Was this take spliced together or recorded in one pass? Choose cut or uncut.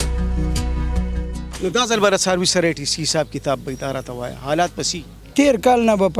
cut